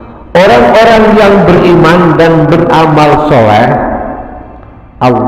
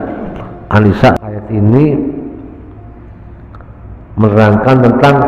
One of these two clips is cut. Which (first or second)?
second